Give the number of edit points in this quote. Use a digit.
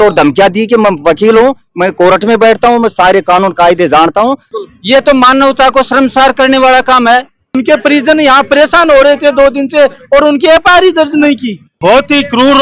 3